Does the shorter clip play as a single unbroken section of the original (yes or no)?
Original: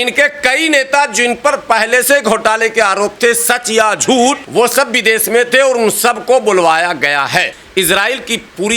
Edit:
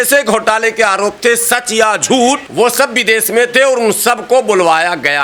yes